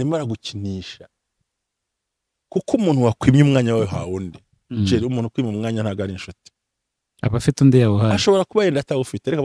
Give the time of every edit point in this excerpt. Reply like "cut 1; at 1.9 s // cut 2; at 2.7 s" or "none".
none